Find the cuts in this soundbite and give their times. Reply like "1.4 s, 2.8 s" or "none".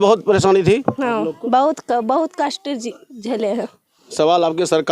4.0 s

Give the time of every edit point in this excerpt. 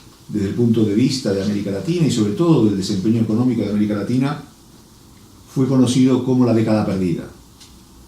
1.7 s

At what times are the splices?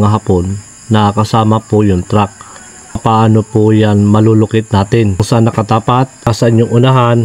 3.0 s, 5.2 s, 6.3 s

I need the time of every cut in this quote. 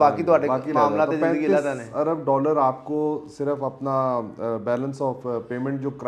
none

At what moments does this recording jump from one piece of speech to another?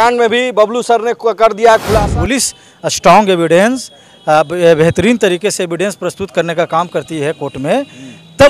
2.1 s

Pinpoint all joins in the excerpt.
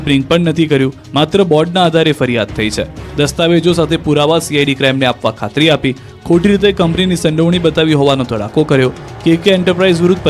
6.1 s

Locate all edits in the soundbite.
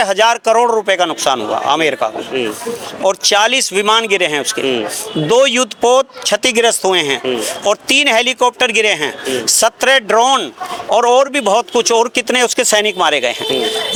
none

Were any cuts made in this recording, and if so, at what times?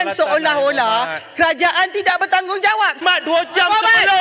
3.0 s

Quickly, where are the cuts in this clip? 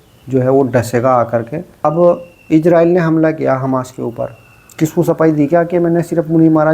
1.6 s

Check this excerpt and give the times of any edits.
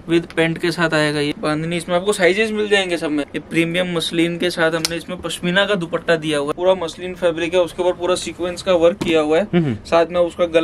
1.3 s, 3.3 s, 6.5 s

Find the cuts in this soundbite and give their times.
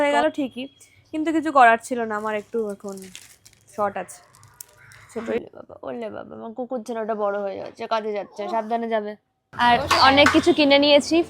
5.4 s, 9.4 s

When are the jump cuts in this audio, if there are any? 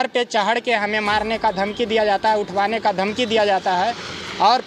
none

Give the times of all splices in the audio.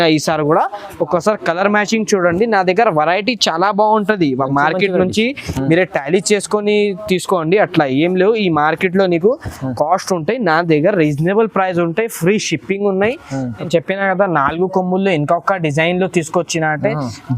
13.7 s

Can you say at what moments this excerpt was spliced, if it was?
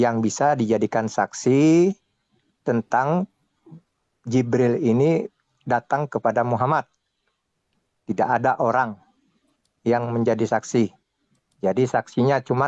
none

